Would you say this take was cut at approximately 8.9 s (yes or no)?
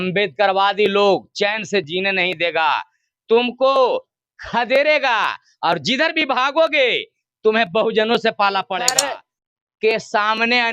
yes